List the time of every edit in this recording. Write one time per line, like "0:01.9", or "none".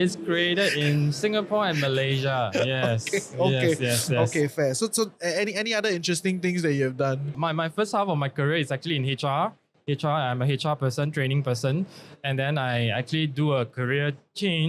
none